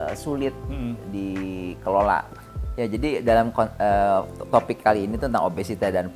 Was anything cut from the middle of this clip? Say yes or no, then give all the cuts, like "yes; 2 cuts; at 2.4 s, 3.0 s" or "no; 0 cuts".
yes; 1 cut; at 2.5 s